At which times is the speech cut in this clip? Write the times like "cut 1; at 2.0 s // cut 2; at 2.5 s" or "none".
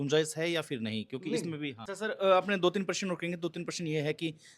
cut 1; at 1.8 s

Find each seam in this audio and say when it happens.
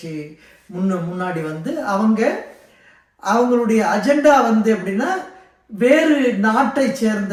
none

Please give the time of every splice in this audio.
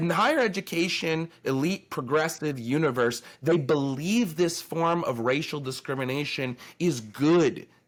none

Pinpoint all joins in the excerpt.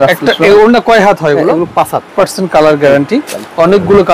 cut 1; at 2.1 s

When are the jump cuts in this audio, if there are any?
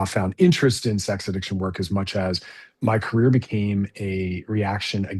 none

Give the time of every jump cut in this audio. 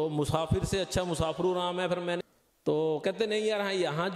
cut 1; at 2.2 s

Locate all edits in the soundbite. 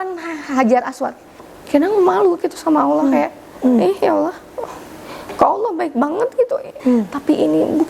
cut 1; at 1.4 s // cut 2; at 6.7 s

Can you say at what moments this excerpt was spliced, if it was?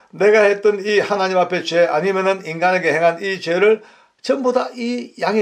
none

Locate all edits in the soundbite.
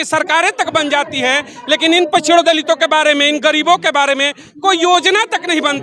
none

